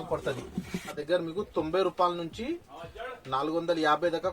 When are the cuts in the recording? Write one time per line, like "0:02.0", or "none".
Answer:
0:01.0